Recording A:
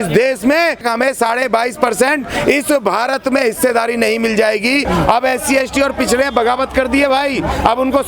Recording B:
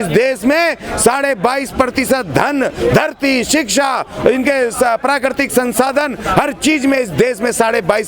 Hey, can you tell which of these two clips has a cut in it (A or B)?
A